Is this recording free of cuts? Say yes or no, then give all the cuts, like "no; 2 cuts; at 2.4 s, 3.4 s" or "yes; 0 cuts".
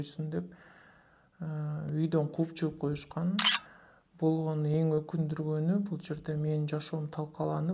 no; 1 cut; at 3.5 s